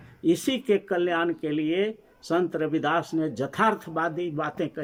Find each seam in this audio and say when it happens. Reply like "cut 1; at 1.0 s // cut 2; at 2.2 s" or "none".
none